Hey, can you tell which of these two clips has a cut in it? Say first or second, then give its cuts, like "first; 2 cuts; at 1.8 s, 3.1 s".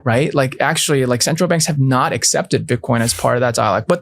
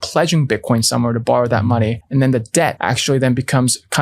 second; 2 cuts; at 2.0 s, 2.8 s